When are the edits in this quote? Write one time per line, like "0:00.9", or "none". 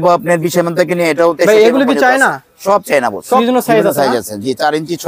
0:03.4